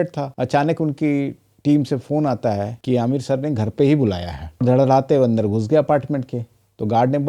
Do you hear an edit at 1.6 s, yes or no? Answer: no